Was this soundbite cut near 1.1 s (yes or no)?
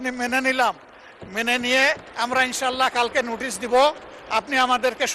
no